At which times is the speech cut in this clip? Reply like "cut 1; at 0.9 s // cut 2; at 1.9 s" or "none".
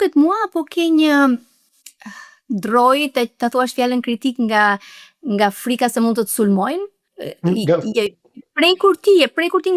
none